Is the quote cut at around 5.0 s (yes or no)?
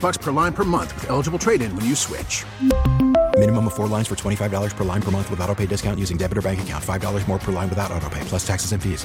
no